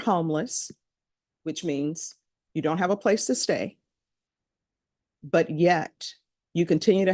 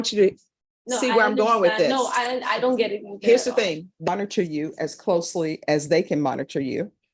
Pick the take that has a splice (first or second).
second